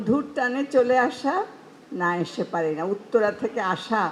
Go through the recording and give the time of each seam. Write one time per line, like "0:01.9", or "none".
none

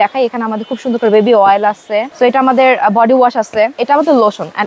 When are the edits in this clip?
0:02.1
0:03.8

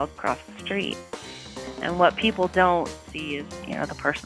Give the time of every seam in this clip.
0:03.1

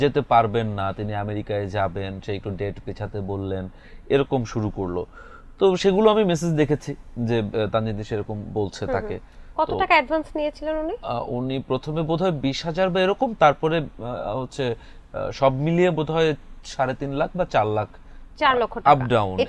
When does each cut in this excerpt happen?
none

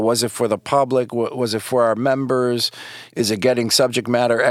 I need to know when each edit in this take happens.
none

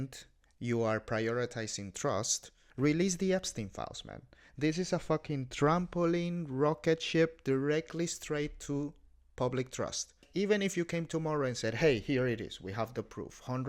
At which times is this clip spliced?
0:10.2

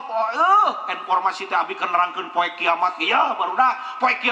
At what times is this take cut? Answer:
none

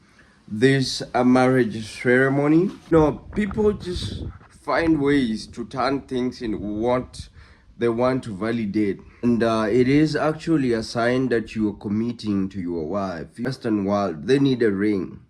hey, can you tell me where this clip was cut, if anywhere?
0:02.9
0:09.2
0:13.5

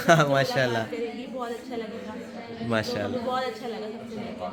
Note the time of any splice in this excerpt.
none

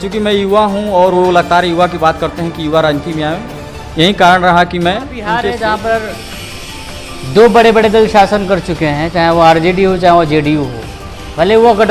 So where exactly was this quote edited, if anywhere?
0:05.3

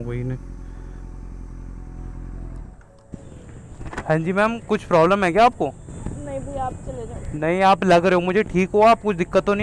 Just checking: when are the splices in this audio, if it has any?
none

